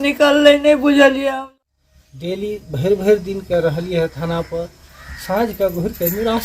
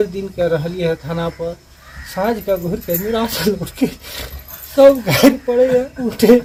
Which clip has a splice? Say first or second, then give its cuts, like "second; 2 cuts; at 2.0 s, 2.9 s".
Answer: first; 1 cut; at 1.3 s